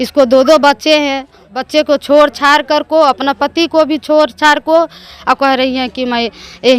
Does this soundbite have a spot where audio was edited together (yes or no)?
yes